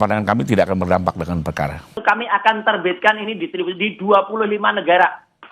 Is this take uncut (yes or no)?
no